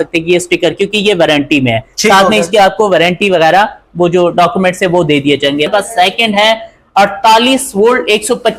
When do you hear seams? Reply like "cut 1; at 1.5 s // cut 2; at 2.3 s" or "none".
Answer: cut 1; at 5.7 s

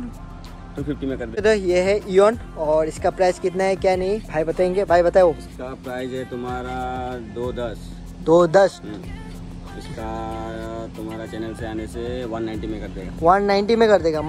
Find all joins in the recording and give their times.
cut 1; at 1.4 s

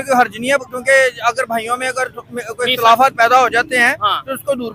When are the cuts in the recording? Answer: none

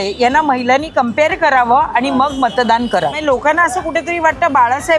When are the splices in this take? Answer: cut 1; at 3.2 s

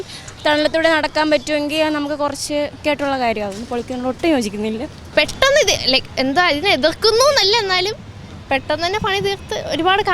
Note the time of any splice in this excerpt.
cut 1; at 2.8 s // cut 2; at 5.0 s

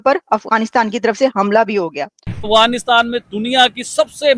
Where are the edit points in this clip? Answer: cut 1; at 2.5 s

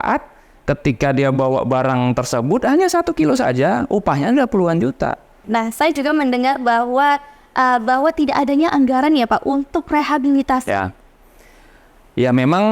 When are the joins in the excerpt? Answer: cut 1; at 5.4 s

